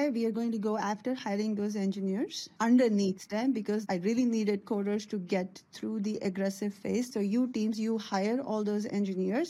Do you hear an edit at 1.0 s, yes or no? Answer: no